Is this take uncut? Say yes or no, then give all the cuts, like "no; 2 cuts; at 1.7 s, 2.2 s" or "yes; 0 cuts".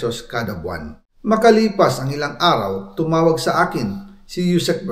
yes; 0 cuts